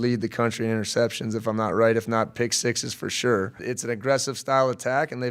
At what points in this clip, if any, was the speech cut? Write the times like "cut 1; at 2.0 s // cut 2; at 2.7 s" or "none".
cut 1; at 3.6 s